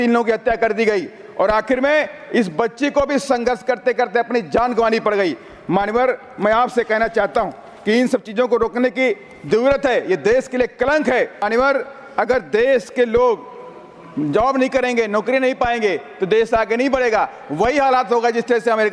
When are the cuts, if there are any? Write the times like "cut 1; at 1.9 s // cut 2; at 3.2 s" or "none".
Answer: cut 1; at 11.4 s